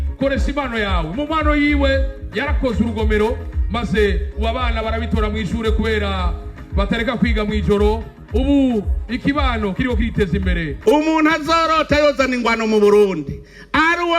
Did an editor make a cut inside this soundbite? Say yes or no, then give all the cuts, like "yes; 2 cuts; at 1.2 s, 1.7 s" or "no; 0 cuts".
yes; 1 cut; at 10.7 s